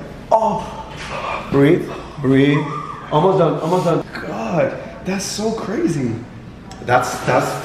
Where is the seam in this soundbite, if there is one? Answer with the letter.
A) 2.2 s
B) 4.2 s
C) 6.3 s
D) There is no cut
B